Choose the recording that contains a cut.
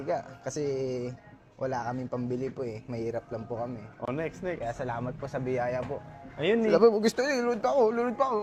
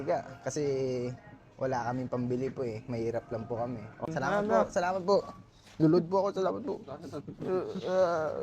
second; 1 cut; at 4.1 s

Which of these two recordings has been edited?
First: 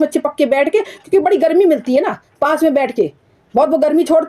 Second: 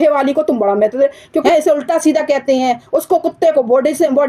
second; 1 cut; at 1.4 s

